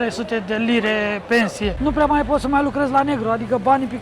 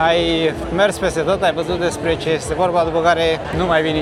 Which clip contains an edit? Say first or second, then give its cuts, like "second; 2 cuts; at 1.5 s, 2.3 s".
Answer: first; 1 cut; at 1.8 s